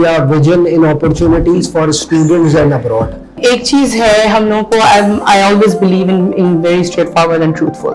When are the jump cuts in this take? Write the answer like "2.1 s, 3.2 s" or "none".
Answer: 3.4 s